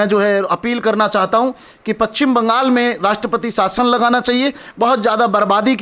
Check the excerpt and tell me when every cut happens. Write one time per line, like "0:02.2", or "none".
0:04.7

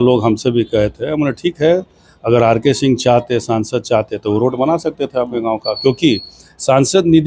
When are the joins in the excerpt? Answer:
none

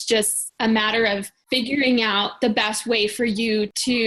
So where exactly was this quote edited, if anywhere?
0:01.3

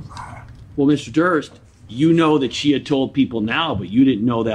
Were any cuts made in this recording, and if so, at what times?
none

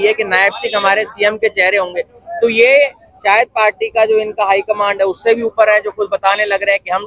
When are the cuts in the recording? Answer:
none

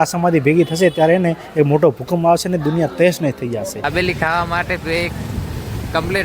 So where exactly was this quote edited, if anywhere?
0:03.9

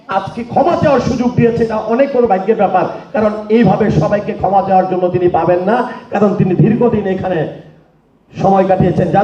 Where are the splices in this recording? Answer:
none

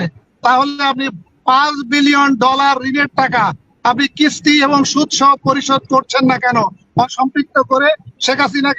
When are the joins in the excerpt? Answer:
0:07.1

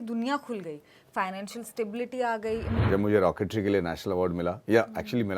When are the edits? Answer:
0:02.8

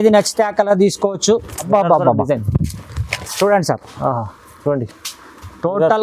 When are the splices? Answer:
0:01.7

